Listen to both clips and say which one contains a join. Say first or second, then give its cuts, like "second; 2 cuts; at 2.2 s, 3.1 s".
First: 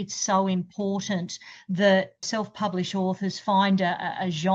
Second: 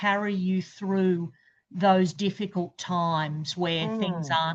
first; 1 cut; at 2.2 s